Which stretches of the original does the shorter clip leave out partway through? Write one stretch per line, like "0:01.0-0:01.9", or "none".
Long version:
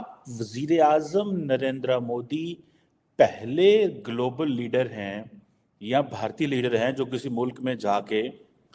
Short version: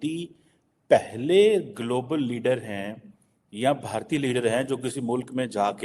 none